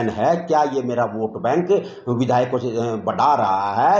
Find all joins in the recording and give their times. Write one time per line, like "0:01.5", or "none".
none